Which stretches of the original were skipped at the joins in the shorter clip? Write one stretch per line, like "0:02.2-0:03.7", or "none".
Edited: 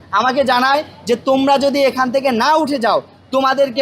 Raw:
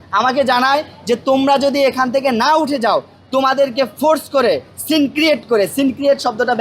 none